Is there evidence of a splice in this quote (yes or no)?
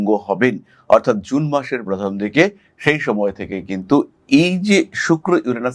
no